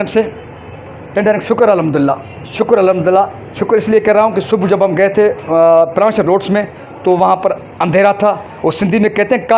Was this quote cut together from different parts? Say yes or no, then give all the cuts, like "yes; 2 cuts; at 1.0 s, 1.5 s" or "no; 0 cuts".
no; 0 cuts